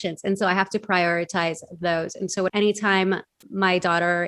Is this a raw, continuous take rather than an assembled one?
no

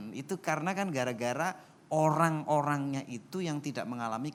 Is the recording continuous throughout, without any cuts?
yes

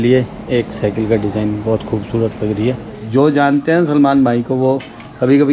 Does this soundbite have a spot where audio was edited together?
yes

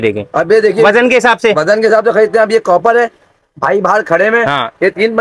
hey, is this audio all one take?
yes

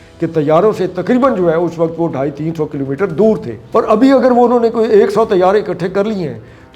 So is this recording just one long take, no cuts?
no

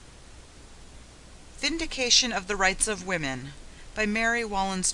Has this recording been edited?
yes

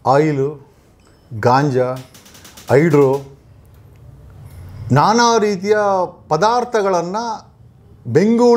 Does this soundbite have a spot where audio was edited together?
no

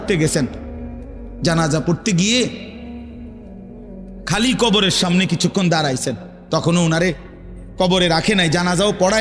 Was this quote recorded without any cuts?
no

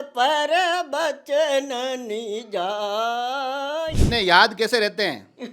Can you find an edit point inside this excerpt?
yes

